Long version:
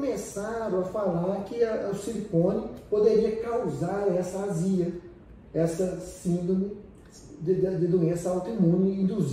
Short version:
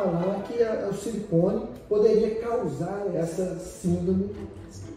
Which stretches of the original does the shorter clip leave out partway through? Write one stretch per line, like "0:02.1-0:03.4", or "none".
0:04.1-0:05.5